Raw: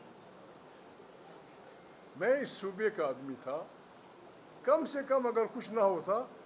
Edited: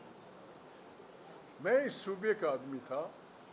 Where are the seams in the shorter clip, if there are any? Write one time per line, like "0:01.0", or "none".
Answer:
0:01.5